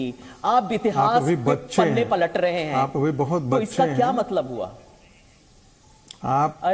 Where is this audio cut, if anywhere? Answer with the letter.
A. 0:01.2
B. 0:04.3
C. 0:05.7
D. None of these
D